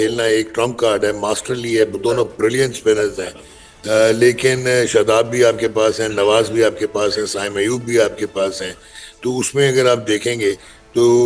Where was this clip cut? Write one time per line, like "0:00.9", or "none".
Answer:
none

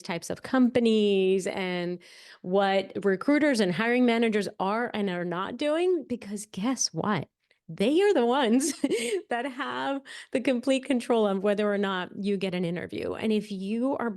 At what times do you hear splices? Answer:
0:02.9

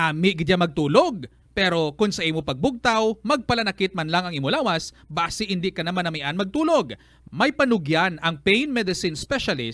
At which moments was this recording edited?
0:01.0

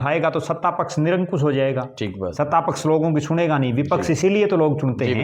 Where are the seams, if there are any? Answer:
none

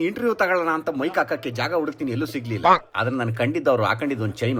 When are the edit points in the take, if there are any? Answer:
none

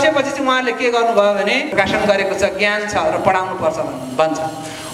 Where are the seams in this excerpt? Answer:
0:01.7

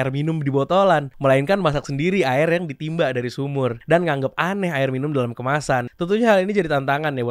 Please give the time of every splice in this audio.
0:03.8
0:05.9

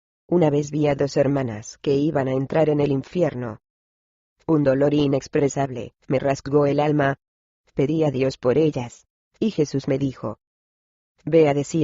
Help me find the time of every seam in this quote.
0:05.2

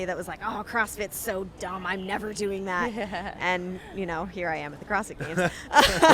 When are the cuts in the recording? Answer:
none

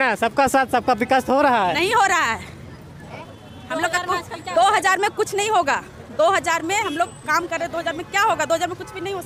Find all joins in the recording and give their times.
none

